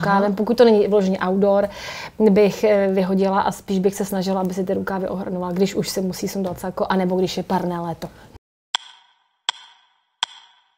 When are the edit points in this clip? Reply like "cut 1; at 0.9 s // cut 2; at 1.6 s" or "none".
cut 1; at 8.2 s